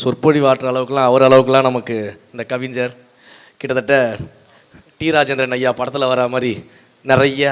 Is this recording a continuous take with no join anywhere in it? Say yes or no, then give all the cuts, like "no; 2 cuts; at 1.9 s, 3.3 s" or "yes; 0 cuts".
yes; 0 cuts